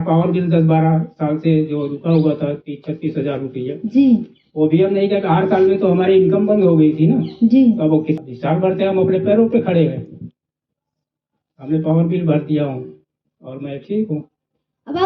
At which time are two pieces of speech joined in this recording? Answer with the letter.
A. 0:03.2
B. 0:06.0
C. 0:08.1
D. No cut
C